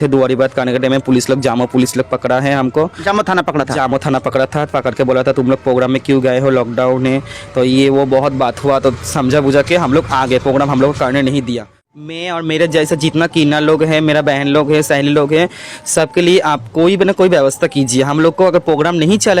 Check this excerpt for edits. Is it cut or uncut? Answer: cut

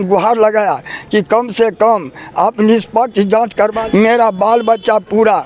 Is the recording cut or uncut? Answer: cut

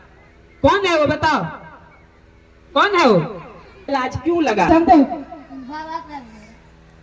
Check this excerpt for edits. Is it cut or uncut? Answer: cut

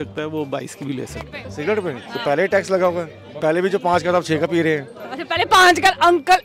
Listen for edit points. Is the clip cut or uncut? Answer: cut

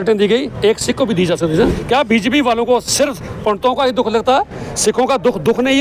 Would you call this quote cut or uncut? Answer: cut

